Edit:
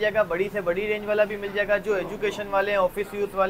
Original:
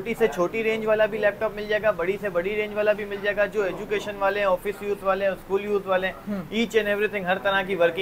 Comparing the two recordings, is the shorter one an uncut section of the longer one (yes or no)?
yes